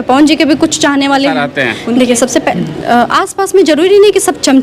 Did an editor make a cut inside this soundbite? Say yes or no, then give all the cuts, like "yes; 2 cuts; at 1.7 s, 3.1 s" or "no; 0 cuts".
yes; 1 cut; at 1.5 s